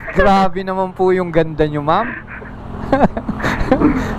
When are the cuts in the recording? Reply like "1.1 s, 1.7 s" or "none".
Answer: none

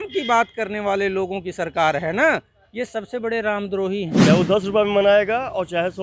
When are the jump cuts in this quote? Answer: 4.1 s

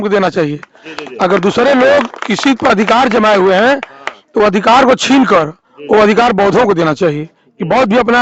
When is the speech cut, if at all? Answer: none

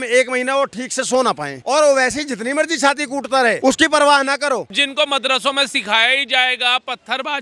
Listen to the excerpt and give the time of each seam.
1.5 s, 3.6 s, 4.8 s

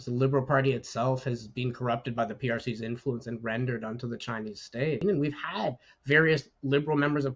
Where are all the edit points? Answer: 5.0 s

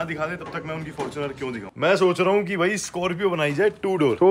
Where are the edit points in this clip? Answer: 1.6 s

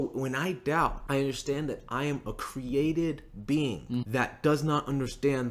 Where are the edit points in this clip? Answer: 1.0 s, 4.1 s

